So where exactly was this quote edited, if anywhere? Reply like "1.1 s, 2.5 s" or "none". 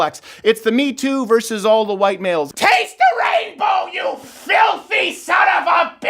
2.5 s